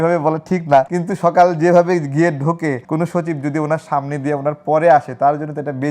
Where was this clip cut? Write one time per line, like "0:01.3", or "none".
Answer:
0:01.0
0:02.8